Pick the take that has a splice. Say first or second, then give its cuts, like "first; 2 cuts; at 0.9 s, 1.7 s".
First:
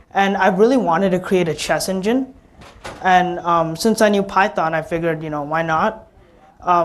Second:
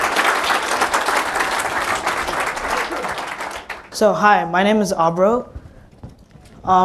first; 1 cut; at 3.2 s